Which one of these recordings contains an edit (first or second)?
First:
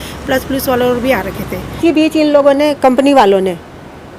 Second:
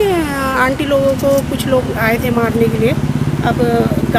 first